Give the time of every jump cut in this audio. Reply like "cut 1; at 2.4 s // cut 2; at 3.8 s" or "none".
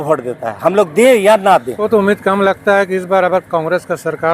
cut 1; at 1.8 s